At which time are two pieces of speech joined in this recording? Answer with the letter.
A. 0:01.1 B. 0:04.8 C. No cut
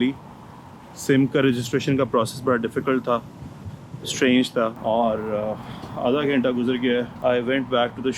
B